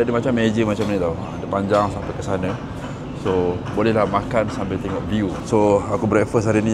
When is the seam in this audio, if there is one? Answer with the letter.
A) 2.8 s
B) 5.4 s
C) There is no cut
C